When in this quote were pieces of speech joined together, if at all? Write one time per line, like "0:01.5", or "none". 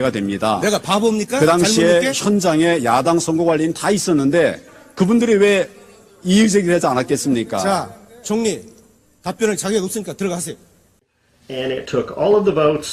none